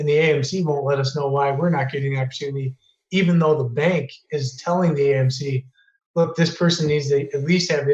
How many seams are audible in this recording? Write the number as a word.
zero